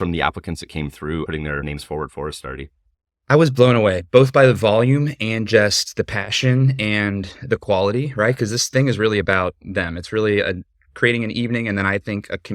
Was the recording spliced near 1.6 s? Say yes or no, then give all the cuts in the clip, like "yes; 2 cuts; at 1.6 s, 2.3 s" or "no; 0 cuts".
yes; 1 cut; at 1.6 s